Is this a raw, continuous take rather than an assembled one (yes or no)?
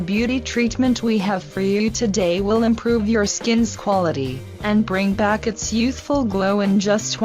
no